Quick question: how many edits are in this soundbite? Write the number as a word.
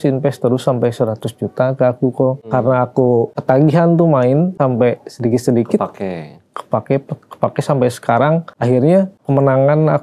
five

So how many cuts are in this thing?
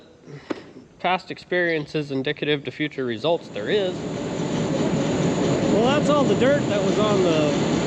one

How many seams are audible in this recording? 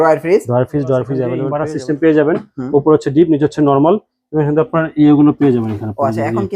one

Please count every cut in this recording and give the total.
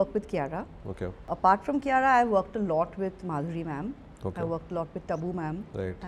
one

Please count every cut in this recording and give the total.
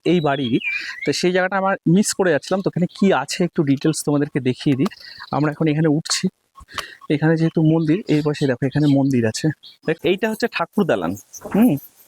one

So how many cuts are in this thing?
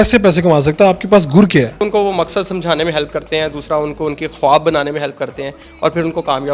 one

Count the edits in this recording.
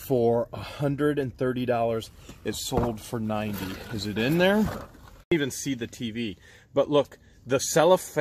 one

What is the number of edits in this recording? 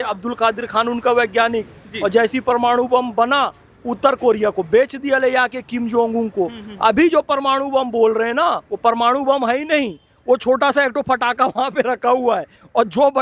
zero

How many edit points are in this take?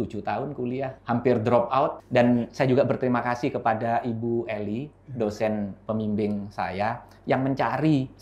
two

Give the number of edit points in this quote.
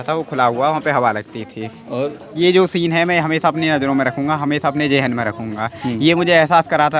one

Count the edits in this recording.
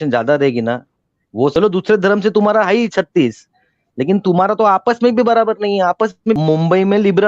two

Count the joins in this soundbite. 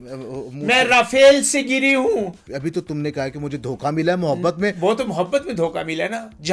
one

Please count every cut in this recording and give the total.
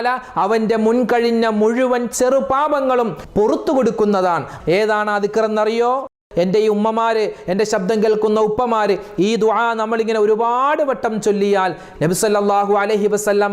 three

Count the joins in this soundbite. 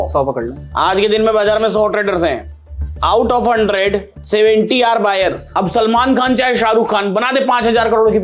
one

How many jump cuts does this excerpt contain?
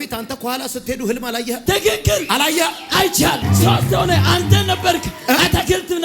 two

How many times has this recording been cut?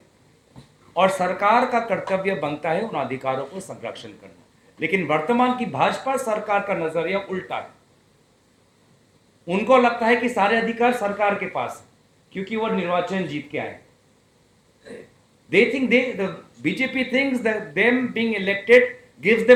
zero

